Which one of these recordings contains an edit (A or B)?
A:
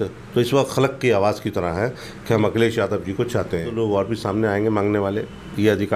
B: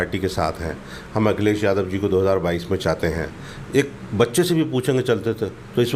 A